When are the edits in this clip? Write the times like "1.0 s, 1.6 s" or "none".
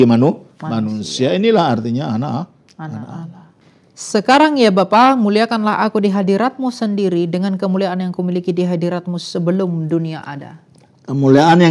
3.5 s